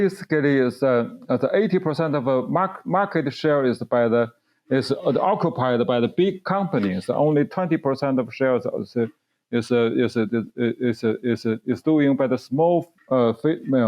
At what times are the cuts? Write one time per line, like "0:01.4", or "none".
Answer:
0:12.9